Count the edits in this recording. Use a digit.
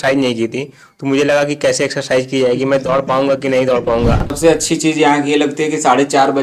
1